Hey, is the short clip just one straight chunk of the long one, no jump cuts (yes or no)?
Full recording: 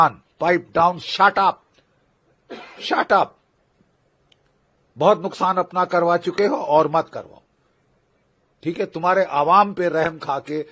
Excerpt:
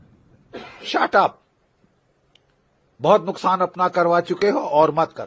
yes